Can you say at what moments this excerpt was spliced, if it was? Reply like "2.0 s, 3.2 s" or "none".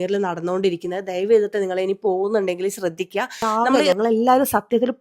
3.8 s